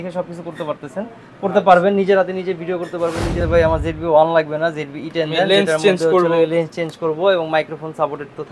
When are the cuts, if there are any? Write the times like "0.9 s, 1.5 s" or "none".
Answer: 3.4 s